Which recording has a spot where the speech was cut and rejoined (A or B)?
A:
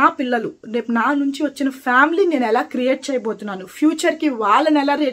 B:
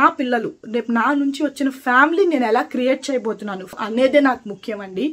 B